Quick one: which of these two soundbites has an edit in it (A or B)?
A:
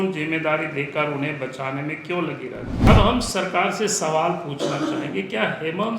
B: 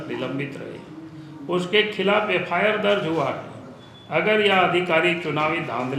A